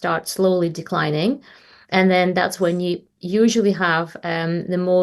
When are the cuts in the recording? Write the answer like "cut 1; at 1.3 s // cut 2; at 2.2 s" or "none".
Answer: none